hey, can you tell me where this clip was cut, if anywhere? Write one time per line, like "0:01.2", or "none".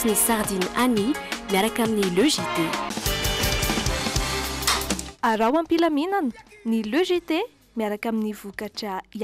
none